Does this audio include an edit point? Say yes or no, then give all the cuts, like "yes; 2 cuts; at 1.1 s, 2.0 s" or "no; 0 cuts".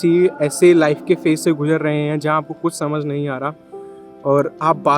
no; 0 cuts